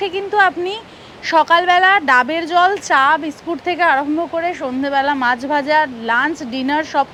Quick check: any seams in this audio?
no; 0 cuts

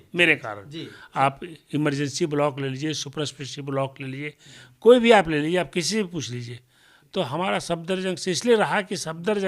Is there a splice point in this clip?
no; 0 cuts

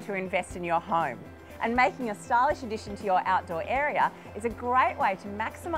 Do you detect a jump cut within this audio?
no; 0 cuts

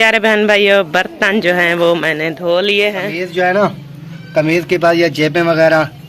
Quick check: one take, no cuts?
no; 1 cut; at 3.2 s

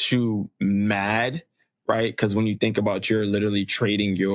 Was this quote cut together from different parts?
no; 0 cuts

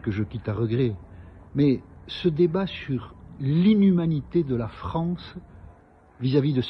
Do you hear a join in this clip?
no; 0 cuts

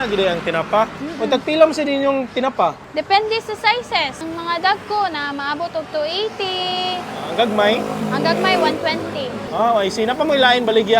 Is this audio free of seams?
no; 4 cuts; at 1.0 s, 2.8 s, 4.2 s, 9.4 s

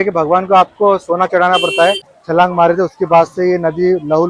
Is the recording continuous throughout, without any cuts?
no; 1 cut; at 2.1 s

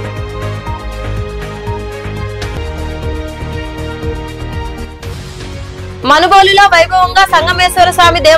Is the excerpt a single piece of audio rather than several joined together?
no; 1 cut; at 2.5 s

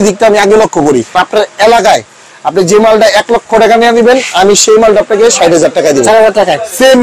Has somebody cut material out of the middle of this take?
yes; 1 cut; at 1.1 s

